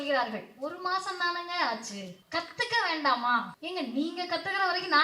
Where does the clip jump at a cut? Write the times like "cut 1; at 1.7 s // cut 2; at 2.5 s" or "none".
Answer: cut 1; at 2.2 s // cut 2; at 3.6 s